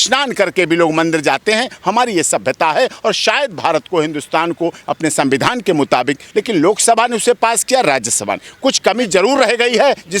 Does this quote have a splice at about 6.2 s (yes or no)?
yes